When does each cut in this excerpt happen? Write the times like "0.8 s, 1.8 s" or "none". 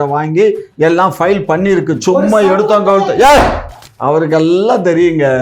3.7 s